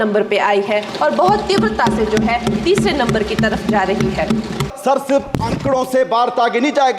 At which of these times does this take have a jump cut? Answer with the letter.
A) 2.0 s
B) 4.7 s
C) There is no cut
B